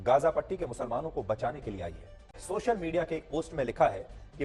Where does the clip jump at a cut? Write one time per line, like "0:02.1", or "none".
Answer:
0:02.4